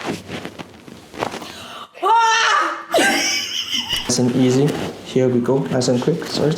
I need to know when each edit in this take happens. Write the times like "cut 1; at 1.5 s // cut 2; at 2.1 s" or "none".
cut 1; at 4.1 s